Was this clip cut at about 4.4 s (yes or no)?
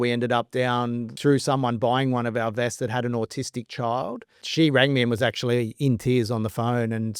yes